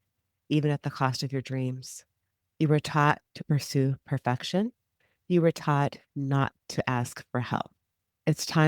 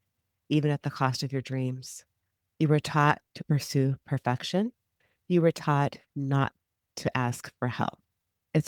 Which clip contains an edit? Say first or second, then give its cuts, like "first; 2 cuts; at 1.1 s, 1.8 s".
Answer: first; 1 cut; at 6.6 s